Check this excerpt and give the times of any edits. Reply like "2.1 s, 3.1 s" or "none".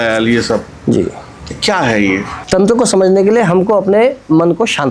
2.3 s